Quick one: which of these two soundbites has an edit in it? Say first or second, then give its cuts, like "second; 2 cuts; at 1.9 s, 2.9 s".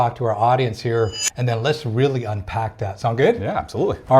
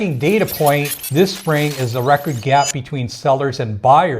second; 1 cut; at 1.0 s